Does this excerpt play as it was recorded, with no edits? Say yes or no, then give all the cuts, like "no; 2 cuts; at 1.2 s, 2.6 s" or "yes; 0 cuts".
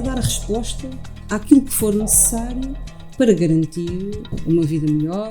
no; 1 cut; at 4.3 s